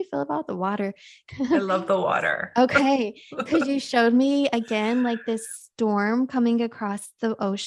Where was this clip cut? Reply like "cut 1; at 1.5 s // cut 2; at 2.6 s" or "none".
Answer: cut 1; at 1.1 s